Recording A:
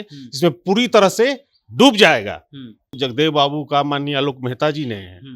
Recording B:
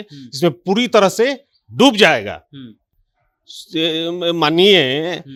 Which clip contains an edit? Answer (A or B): A